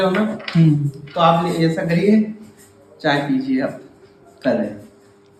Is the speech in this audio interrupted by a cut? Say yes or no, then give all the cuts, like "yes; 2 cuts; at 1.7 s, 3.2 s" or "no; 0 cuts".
no; 0 cuts